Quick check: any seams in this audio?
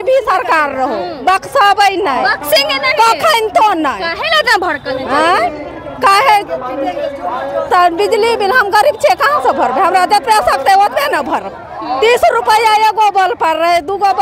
no; 0 cuts

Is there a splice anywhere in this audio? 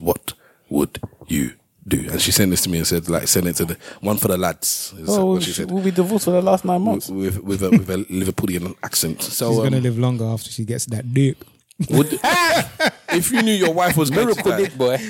no; 0 cuts

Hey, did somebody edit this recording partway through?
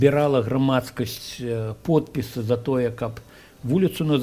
no; 0 cuts

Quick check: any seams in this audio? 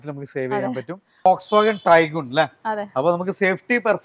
yes; 1 cut; at 1.1 s

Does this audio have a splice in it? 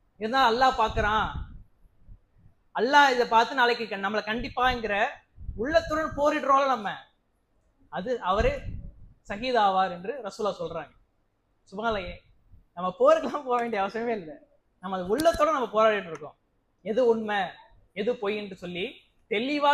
no; 0 cuts

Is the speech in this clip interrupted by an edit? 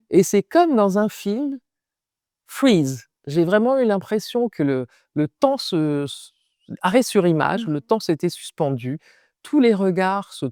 no; 0 cuts

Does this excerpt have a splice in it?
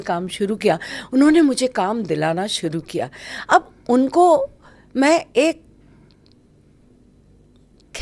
no; 0 cuts

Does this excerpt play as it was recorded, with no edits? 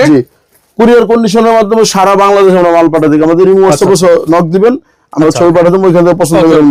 yes; 0 cuts

